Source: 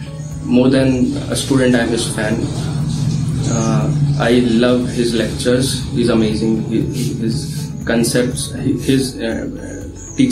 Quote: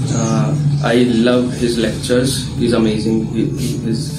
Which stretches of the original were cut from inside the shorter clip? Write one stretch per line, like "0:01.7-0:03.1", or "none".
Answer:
none